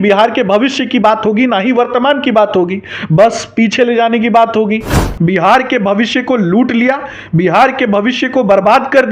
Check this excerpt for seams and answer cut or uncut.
cut